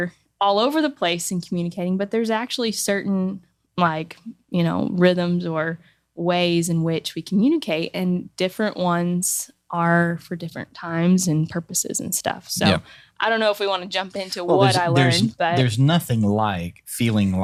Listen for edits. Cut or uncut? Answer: uncut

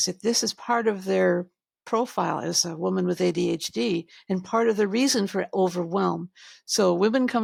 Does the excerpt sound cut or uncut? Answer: uncut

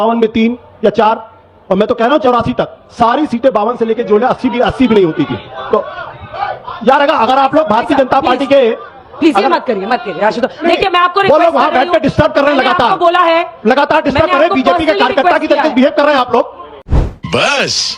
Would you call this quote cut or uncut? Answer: uncut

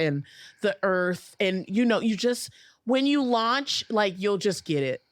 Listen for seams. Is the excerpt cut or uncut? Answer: uncut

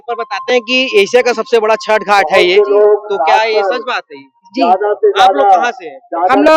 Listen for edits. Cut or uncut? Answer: uncut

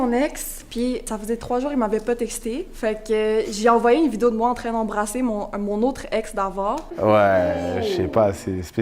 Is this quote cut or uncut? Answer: cut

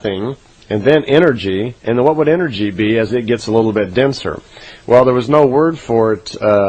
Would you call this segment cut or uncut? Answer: cut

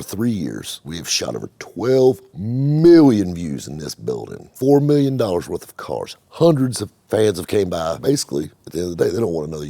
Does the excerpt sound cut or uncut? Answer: cut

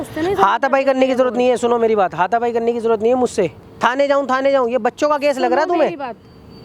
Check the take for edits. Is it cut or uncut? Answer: cut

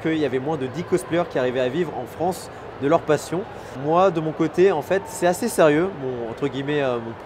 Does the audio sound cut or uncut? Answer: uncut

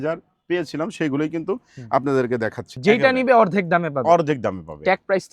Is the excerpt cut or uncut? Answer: cut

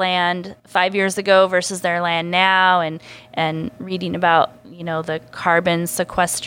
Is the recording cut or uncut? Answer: uncut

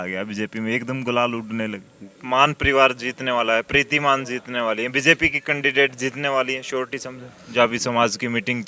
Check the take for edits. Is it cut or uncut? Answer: cut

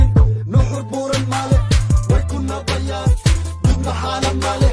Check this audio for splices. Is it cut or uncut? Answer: uncut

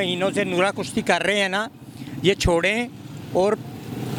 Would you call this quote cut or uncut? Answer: uncut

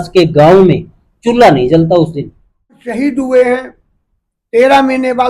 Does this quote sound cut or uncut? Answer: cut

